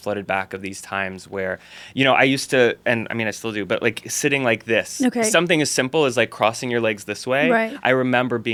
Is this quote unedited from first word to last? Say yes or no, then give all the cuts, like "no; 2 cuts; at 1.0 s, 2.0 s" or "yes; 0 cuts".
yes; 0 cuts